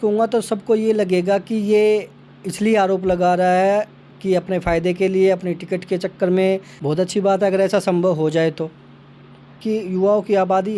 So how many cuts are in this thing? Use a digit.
2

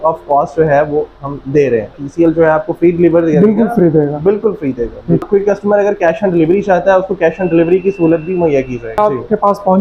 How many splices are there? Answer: 3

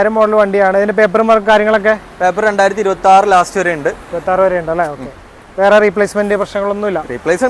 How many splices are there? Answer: 0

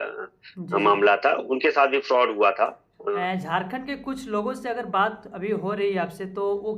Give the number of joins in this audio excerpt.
1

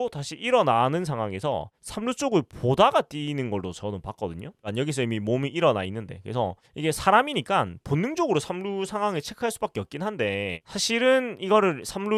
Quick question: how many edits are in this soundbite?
0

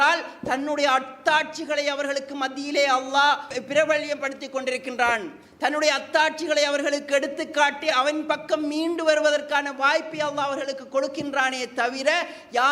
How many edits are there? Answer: 2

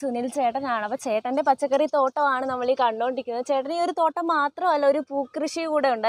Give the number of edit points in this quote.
0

